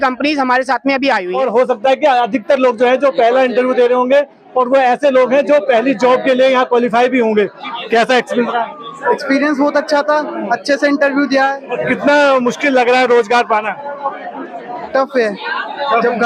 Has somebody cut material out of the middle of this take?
yes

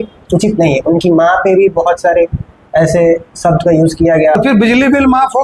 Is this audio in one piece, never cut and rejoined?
no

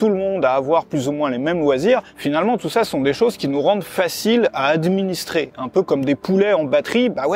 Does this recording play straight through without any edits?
yes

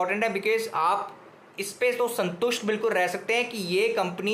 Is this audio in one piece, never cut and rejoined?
yes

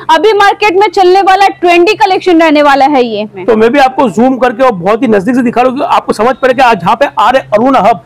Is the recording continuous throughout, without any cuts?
no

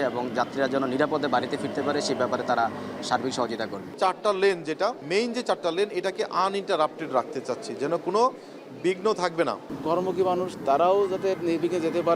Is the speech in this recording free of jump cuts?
no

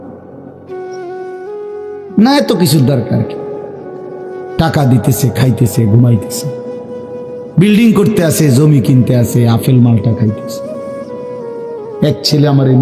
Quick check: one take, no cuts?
no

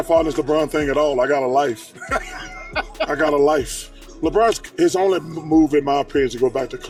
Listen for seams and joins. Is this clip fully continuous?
yes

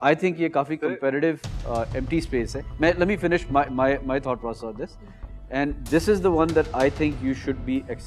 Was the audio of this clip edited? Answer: no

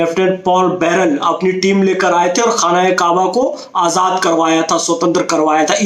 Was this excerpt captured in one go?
yes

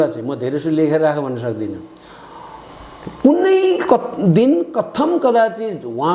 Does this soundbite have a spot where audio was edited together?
no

